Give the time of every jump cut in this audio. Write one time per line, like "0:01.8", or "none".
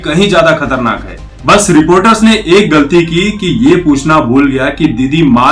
0:01.1